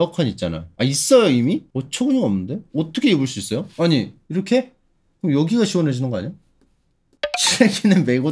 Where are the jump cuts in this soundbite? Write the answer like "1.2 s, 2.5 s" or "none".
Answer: 1.7 s, 7.2 s